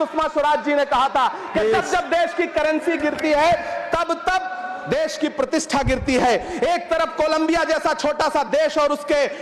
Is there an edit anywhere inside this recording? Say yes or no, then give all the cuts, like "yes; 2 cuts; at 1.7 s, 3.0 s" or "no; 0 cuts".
no; 0 cuts